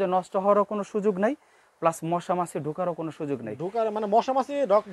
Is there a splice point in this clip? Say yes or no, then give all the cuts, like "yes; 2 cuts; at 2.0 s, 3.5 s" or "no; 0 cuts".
no; 0 cuts